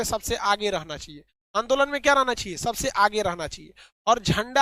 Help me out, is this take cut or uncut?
uncut